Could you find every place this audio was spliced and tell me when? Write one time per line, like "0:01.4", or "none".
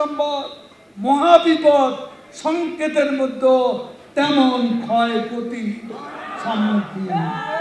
none